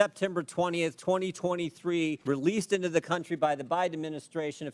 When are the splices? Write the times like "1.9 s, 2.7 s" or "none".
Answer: 2.2 s